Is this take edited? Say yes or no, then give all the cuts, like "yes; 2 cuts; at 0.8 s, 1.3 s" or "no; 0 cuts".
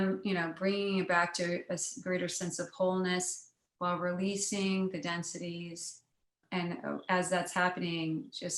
yes; 1 cut; at 6.4 s